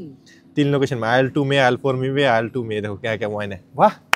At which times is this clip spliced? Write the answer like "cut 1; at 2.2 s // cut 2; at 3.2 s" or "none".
none